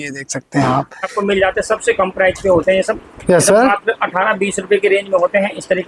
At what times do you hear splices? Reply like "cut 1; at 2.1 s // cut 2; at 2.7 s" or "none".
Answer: cut 1; at 1.1 s